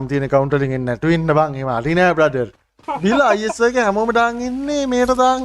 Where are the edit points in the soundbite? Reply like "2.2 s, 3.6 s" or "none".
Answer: 2.9 s